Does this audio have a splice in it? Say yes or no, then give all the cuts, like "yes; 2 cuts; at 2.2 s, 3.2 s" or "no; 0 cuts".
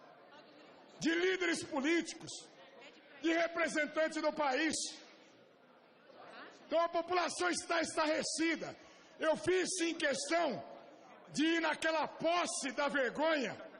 yes; 1 cut; at 3.7 s